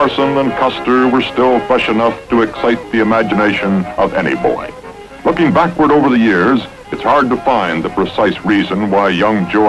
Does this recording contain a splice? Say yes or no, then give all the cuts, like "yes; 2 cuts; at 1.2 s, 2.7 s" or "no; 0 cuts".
yes; 1 cut; at 2.6 s